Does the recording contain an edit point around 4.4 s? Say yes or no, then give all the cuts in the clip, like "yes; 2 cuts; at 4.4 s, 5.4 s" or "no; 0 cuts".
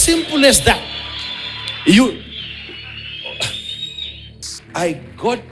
yes; 1 cut; at 4.4 s